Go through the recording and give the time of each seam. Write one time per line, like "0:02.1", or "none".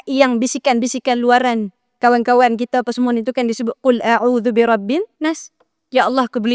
0:05.1